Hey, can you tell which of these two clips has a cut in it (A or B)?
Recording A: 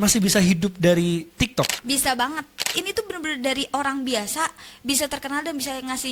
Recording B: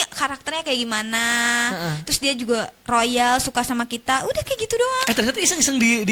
A